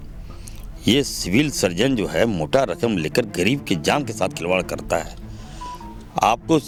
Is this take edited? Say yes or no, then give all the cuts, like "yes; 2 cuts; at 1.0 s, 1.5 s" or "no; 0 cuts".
no; 0 cuts